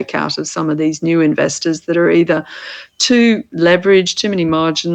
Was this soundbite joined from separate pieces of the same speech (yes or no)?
no